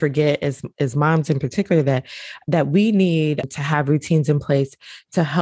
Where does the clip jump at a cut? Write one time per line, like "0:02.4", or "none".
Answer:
0:03.5

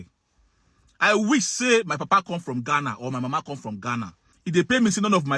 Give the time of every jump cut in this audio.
0:04.2

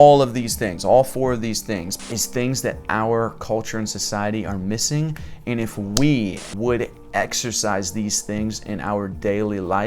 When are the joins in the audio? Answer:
0:02.0
0:06.4

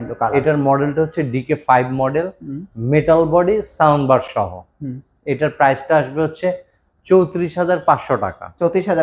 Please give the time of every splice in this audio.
none

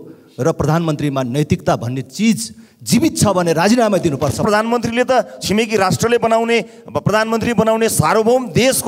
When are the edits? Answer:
0:04.4

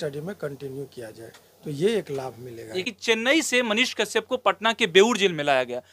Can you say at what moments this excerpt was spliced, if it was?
0:02.8

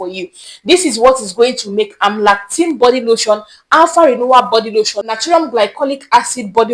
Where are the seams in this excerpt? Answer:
0:05.1

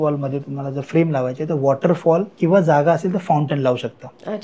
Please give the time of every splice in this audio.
0:02.3

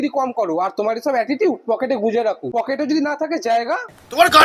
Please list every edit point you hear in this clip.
none

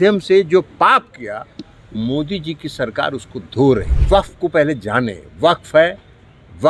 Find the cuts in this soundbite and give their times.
0:03.9

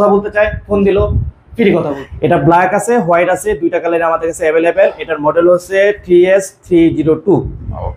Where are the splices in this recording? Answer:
0:01.9

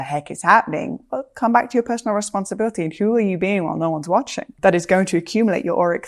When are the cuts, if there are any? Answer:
0:04.4

